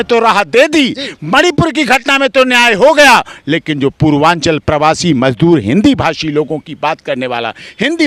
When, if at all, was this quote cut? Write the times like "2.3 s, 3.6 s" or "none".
none